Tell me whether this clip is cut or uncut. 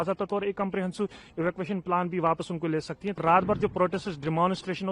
cut